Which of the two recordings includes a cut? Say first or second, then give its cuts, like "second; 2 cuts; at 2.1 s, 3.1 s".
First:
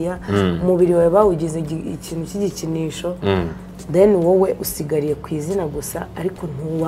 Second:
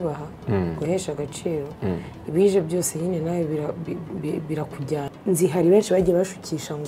second; 1 cut; at 5.1 s